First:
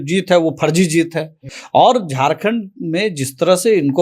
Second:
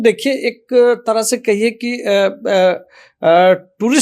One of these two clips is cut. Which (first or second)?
first